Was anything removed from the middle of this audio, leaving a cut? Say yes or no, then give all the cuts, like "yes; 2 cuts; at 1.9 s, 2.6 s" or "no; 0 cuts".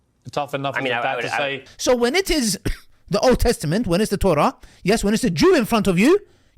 yes; 1 cut; at 1.7 s